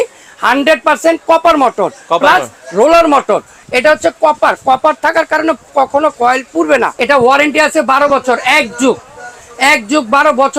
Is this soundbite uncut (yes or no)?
no